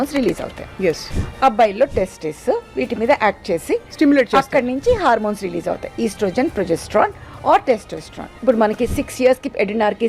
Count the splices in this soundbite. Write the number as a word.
two